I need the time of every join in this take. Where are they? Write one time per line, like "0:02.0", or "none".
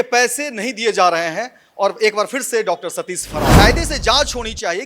0:03.6